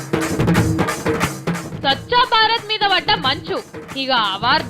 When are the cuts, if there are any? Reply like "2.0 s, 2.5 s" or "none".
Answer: 1.3 s